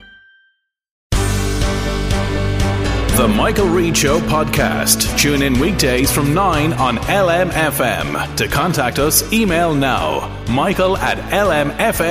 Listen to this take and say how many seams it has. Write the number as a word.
one